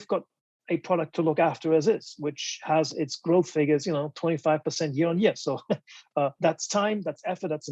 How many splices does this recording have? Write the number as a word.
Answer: zero